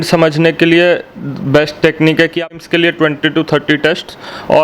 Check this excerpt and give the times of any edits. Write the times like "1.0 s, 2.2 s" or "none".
2.6 s